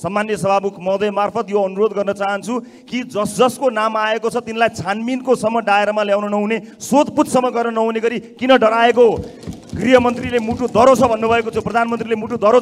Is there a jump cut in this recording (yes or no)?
no